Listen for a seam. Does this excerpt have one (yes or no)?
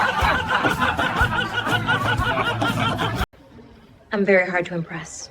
yes